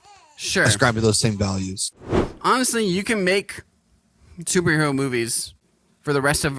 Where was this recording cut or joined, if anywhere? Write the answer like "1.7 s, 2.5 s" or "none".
2.2 s